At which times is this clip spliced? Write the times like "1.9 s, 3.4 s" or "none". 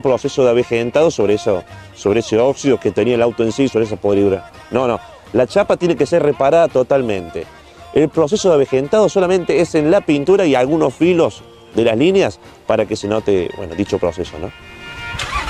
none